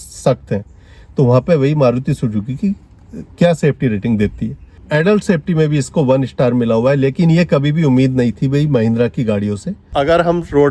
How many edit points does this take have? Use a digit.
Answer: 2